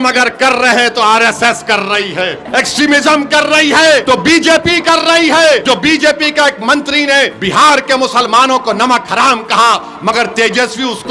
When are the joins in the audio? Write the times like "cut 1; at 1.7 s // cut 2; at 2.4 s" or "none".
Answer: cut 1; at 2.4 s // cut 2; at 4.0 s // cut 3; at 5.6 s // cut 4; at 7.4 s